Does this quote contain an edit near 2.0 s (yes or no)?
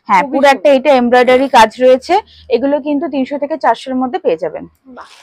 no